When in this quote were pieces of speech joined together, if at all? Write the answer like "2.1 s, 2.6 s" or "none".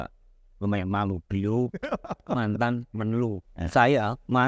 3.5 s